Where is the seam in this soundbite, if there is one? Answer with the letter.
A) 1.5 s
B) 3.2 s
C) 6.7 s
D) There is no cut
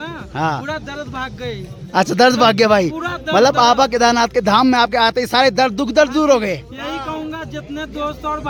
D